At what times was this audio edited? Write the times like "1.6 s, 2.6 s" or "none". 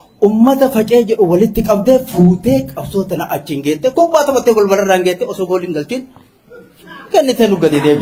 none

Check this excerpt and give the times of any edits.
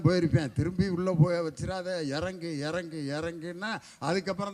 none

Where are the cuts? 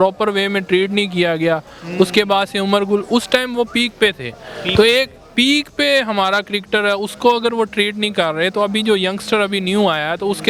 none

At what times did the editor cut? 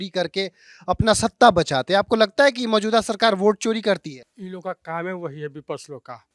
none

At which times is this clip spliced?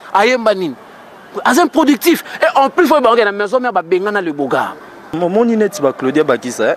5.1 s

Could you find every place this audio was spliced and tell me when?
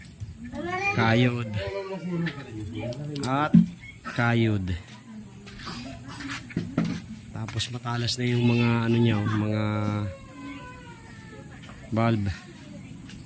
none

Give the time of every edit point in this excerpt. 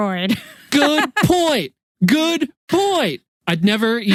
none

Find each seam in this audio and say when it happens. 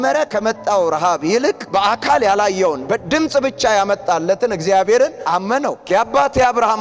1.6 s, 5.8 s

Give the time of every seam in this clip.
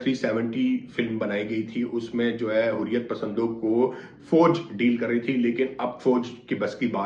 none

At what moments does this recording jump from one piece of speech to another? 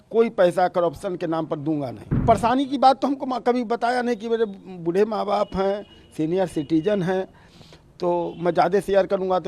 2.1 s

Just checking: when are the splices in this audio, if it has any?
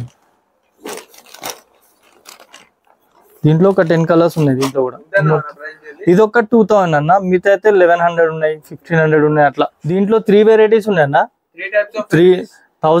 9.8 s

